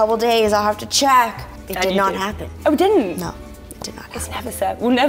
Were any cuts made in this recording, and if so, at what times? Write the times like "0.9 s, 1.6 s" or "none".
none